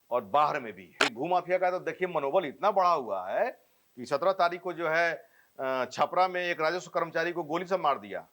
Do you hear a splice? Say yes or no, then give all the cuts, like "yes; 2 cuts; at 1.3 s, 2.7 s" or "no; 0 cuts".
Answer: yes; 1 cut; at 1.0 s